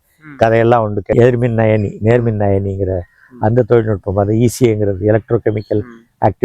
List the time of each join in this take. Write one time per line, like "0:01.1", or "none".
0:01.1